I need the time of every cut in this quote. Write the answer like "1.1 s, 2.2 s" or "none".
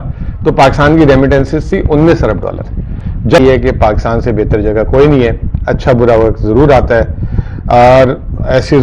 3.4 s